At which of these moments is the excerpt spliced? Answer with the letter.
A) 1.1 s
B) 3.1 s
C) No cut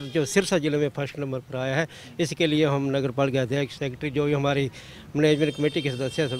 C